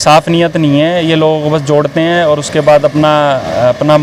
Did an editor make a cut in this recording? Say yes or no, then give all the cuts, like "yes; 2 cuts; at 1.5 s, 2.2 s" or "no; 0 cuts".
no; 0 cuts